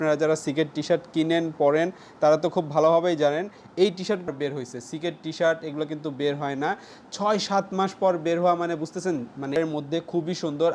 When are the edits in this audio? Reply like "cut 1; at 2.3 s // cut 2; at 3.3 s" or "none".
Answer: cut 1; at 4.3 s // cut 2; at 9.6 s